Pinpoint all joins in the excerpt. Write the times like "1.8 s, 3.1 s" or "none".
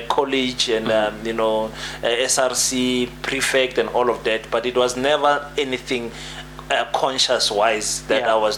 none